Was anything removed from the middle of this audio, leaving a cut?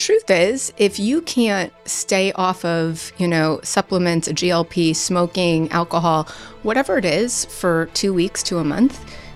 no; 0 cuts

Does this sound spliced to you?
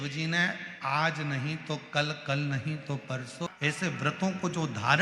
yes; 1 cut; at 3.5 s

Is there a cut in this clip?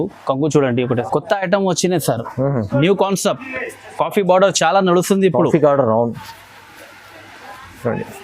yes; 1 cut; at 1.0 s

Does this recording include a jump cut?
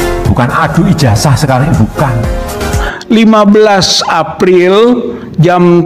yes; 1 cut; at 2.9 s

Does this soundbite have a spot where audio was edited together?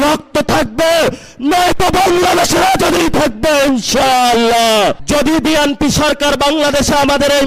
yes; 1 cut; at 5.0 s

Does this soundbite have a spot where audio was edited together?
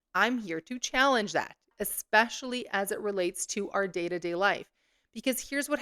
yes; 1 cut; at 1.8 s

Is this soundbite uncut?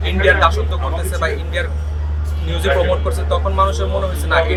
yes; 0 cuts

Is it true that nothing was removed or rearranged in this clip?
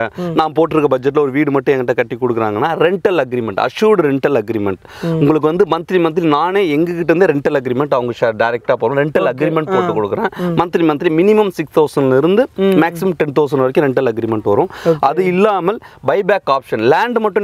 yes; 0 cuts

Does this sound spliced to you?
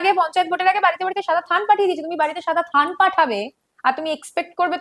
no; 0 cuts

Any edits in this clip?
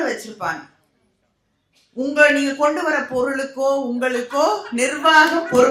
no; 0 cuts

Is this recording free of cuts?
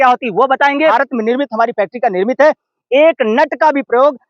no; 1 cut; at 0.9 s

